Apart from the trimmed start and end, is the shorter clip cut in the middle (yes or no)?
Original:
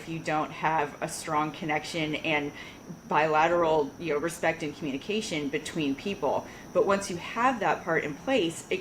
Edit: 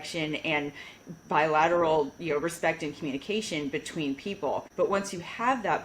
yes